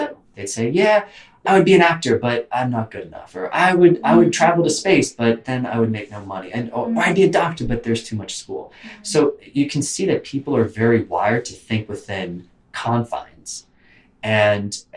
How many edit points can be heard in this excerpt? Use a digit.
1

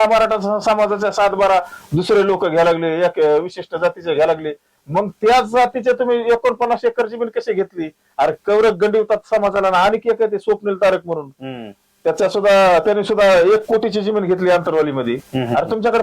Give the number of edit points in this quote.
0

